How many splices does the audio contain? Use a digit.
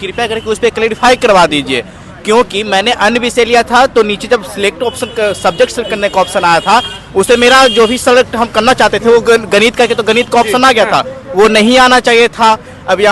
0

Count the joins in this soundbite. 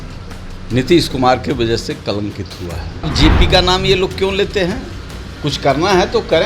1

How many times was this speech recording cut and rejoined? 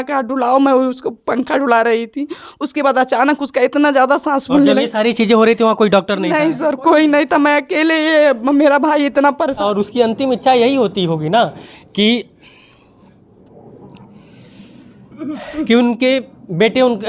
1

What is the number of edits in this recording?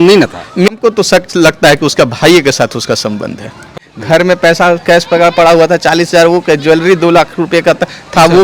2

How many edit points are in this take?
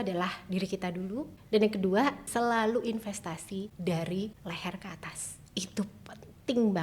4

